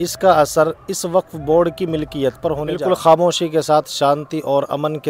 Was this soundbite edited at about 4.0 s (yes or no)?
no